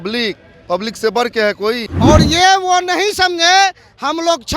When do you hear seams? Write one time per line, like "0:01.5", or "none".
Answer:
0:01.9